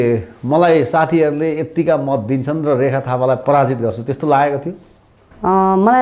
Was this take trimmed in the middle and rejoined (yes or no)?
no